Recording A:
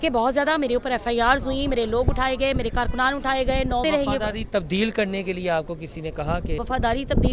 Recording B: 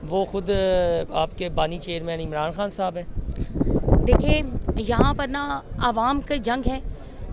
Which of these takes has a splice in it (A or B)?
A